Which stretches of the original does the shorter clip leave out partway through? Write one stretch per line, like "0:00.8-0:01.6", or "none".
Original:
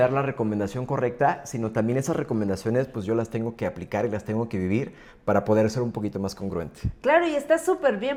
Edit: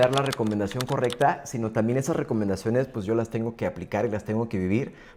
none